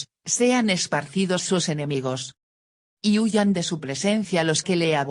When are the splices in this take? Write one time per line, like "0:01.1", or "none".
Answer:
0:01.8